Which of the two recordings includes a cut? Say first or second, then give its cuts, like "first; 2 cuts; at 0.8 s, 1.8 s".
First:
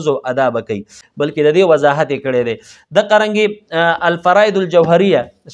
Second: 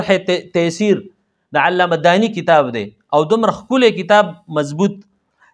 first; 1 cut; at 1.0 s